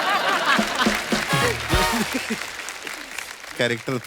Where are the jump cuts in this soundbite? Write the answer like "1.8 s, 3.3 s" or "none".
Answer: none